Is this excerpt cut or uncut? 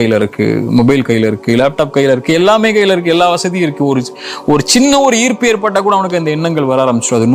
uncut